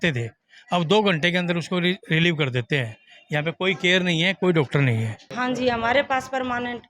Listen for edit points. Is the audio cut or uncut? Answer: cut